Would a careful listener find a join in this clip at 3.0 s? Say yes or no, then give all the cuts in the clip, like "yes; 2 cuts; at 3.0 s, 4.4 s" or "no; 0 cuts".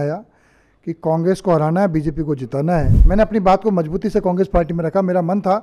yes; 1 cut; at 3.0 s